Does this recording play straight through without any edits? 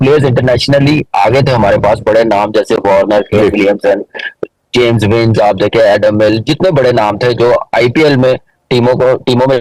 yes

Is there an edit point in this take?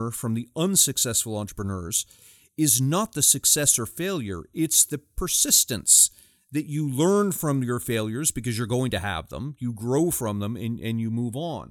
no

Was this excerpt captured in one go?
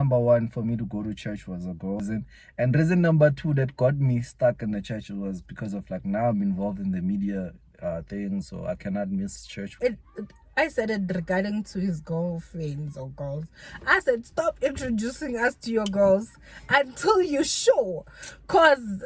no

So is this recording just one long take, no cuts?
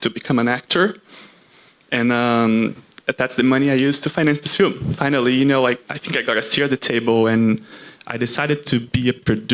yes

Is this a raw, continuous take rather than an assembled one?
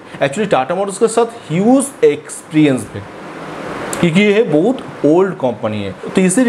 yes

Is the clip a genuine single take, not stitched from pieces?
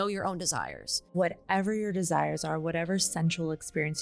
no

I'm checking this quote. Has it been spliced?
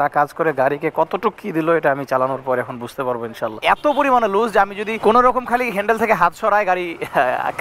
yes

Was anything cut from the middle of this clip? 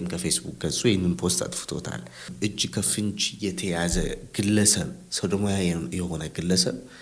yes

